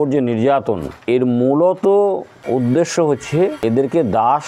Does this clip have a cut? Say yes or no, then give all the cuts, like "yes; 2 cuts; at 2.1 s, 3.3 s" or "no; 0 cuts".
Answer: yes; 3 cuts; at 0.9 s, 2.3 s, 3.8 s